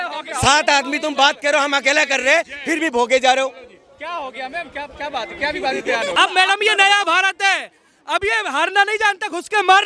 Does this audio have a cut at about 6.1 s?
yes; 1 cut; at 6.1 s

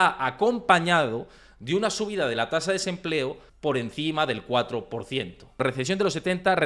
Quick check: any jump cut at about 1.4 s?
no; 2 cuts; at 3.5 s, 5.6 s

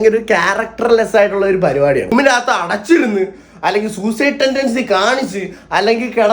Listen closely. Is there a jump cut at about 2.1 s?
yes; 1 cut; at 2.1 s

